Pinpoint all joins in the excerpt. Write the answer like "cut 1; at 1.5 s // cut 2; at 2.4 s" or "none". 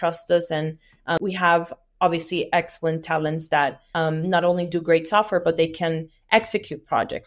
cut 1; at 1.2 s // cut 2; at 3.8 s